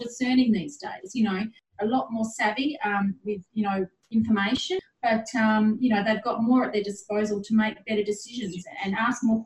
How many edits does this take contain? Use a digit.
2